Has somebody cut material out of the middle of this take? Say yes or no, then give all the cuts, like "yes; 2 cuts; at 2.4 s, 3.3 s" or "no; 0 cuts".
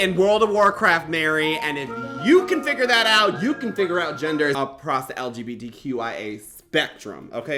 no; 0 cuts